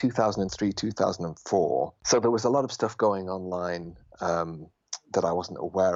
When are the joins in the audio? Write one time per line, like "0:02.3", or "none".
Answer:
0:02.0